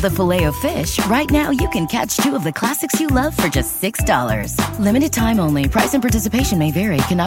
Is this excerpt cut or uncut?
uncut